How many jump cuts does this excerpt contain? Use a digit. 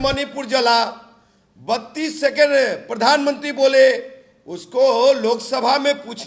0